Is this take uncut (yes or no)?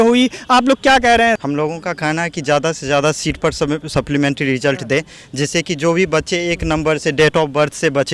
no